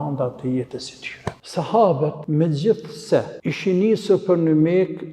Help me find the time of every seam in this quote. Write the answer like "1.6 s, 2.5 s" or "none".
1.4 s, 2.2 s, 3.3 s

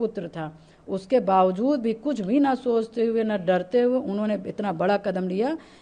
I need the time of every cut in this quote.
none

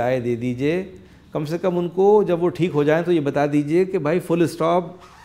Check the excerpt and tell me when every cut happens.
none

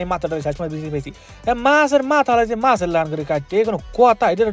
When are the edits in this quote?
none

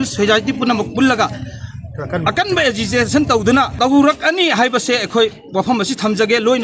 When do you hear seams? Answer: 3.7 s

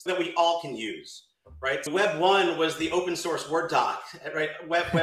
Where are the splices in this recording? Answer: none

